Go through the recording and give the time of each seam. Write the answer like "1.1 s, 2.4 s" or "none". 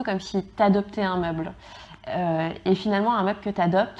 none